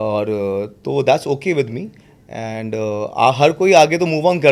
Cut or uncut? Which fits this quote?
uncut